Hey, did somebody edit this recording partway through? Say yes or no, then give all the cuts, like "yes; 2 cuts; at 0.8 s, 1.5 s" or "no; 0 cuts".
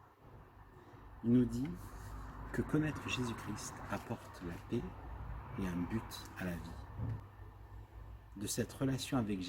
yes; 1 cut; at 7.3 s